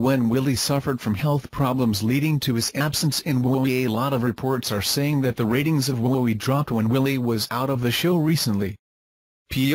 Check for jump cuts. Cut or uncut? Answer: cut